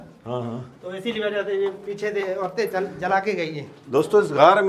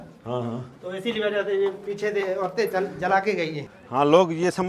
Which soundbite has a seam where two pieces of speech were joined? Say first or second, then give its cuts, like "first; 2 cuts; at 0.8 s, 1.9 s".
second; 1 cut; at 3.7 s